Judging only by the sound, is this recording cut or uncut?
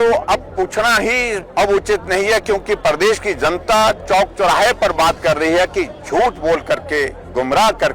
cut